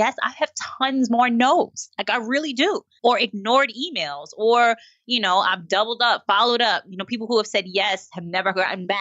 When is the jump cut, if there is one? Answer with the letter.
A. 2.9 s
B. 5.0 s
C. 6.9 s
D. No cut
A